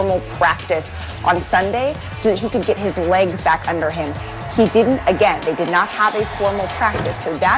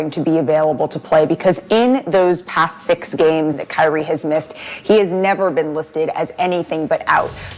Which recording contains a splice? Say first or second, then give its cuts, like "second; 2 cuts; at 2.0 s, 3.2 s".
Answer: second; 1 cut; at 3.6 s